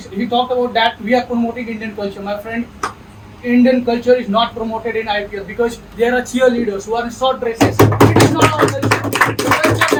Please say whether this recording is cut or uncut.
uncut